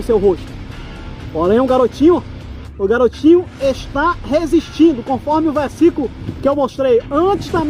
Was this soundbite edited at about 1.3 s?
no; 0 cuts

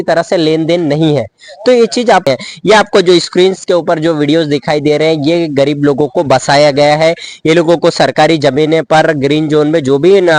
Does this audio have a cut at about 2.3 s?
yes; 1 cut; at 2.3 s

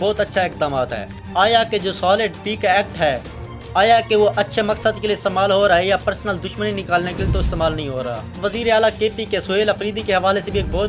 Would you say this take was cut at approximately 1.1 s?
yes; 2 cuts; at 1.1 s, 8.4 s

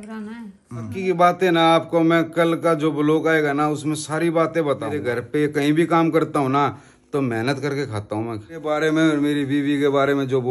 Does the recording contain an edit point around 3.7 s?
no; 3 cuts; at 0.9 s, 5.0 s, 8.7 s

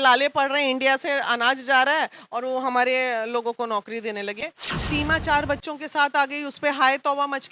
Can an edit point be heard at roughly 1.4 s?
no; 1 cut; at 4.4 s

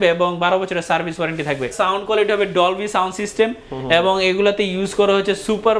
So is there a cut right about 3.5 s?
no; 1 cut; at 1.7 s

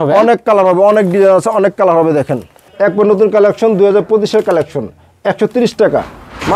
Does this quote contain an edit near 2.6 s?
yes; 1 cut; at 2.6 s

